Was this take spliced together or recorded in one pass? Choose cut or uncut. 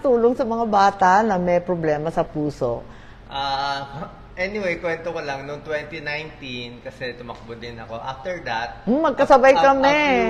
uncut